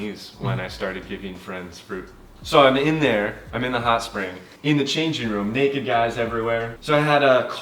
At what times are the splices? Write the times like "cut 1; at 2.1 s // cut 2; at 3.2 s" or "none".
cut 1; at 2.3 s // cut 2; at 4.4 s // cut 3; at 6.7 s